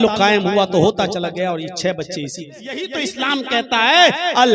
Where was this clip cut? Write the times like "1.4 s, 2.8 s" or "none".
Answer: 2.9 s